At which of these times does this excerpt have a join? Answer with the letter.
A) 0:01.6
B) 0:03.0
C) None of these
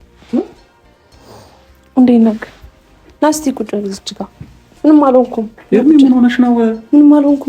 B